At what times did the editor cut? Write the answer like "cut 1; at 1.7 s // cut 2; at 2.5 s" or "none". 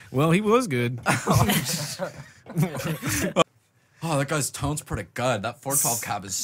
cut 1; at 3.4 s